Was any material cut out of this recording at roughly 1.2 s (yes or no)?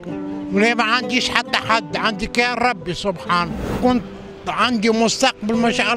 no